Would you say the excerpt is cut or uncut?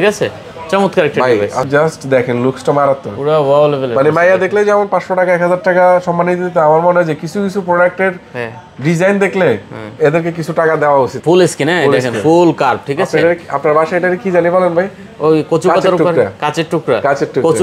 cut